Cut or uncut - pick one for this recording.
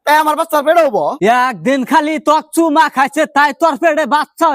cut